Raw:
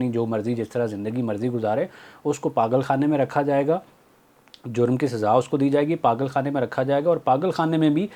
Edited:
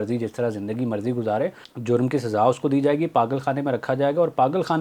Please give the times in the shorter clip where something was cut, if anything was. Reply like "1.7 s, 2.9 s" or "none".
1.7 s